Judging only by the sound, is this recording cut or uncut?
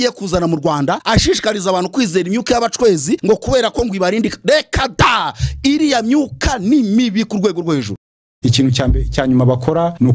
cut